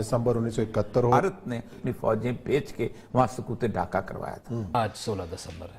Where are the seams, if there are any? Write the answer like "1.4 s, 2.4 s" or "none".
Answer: 1.8 s, 4.7 s